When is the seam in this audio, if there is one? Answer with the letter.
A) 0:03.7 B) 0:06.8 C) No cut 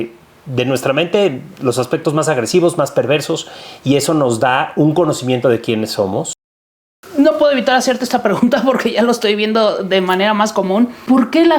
B